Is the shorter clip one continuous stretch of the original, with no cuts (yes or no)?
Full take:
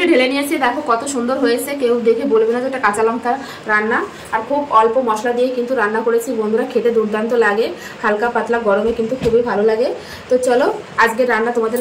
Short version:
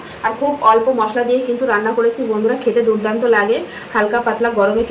yes